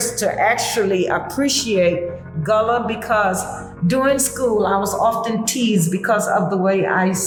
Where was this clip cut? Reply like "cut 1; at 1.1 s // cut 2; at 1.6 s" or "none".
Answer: none